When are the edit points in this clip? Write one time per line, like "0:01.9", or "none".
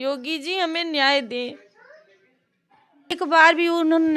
0:03.1